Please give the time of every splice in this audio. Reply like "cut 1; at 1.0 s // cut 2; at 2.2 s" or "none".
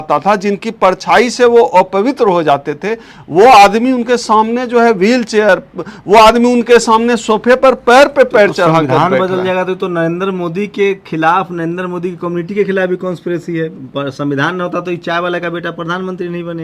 none